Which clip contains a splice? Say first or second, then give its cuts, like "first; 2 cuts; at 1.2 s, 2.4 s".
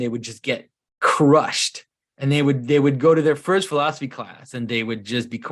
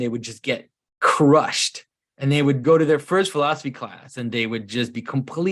second; 1 cut; at 2.6 s